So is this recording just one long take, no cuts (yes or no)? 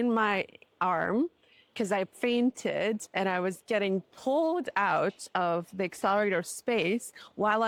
yes